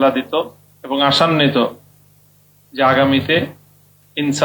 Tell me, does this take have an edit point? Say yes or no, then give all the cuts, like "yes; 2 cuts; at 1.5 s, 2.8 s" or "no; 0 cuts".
no; 0 cuts